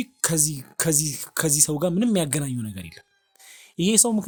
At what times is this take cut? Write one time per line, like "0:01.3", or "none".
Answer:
none